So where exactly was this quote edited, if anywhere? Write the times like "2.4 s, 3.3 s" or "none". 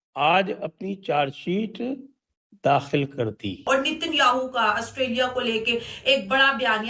3.7 s